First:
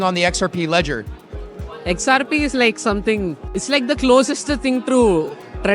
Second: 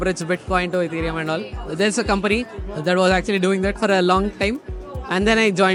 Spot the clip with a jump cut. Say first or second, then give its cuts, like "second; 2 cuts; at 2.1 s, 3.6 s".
first; 1 cut; at 3.5 s